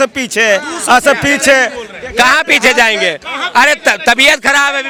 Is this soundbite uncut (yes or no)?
yes